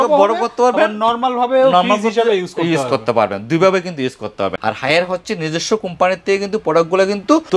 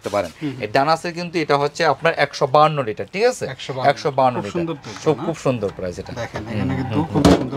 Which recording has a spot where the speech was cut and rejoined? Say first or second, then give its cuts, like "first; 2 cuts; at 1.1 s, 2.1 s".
first; 1 cut; at 4.6 s